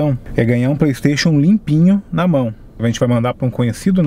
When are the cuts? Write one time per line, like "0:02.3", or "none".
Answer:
0:02.6